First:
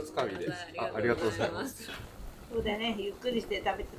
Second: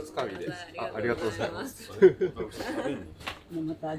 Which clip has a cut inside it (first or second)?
first